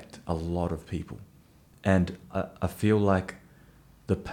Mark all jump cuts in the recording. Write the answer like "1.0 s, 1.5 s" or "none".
none